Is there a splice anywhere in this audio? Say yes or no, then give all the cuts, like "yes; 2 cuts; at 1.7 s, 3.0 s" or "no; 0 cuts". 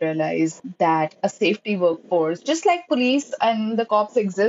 no; 0 cuts